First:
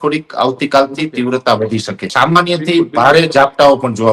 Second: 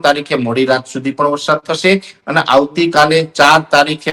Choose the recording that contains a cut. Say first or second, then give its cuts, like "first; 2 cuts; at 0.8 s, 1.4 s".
first; 1 cut; at 2.1 s